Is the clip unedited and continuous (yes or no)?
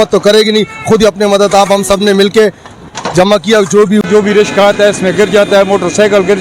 no